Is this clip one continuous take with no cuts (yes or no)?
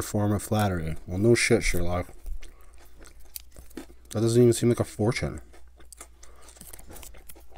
yes